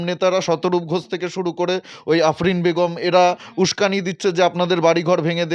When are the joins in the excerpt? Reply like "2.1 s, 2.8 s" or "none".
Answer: none